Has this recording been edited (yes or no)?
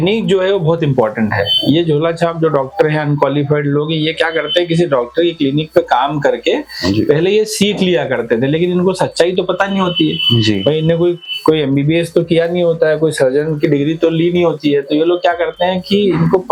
no